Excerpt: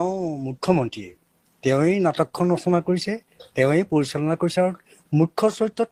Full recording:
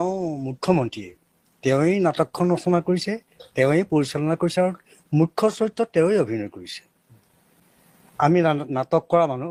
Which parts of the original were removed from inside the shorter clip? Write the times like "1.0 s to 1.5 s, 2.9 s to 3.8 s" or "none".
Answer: none